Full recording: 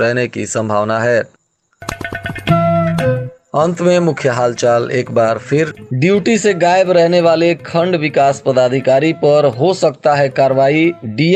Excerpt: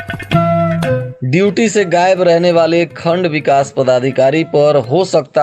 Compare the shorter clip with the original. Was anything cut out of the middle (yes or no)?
yes